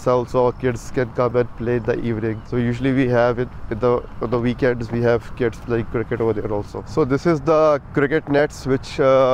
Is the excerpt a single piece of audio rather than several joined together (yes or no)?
yes